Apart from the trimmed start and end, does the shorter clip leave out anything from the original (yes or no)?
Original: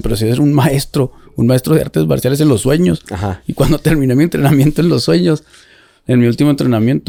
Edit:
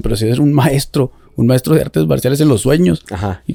no